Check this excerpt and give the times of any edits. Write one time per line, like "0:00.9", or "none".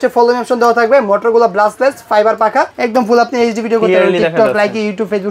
0:02.7